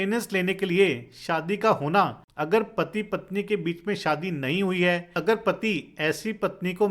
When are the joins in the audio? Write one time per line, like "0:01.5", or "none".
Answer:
0:02.3
0:05.1